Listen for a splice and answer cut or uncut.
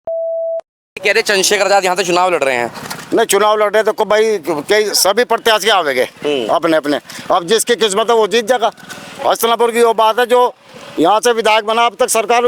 cut